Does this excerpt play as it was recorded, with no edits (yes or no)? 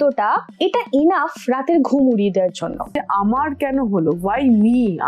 no